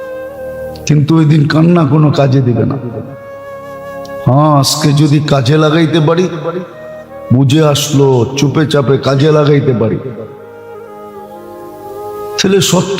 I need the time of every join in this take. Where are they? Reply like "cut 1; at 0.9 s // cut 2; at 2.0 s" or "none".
cut 1; at 10.2 s // cut 2; at 11.8 s